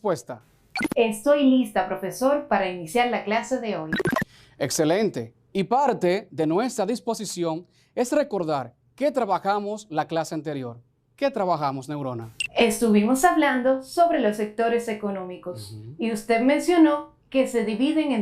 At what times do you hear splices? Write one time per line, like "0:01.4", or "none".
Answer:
0:04.9